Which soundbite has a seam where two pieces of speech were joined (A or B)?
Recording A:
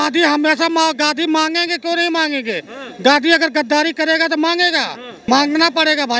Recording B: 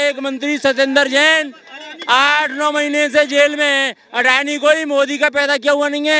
A